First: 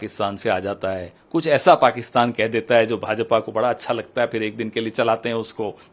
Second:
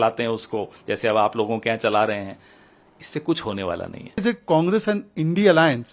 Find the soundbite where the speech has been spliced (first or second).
second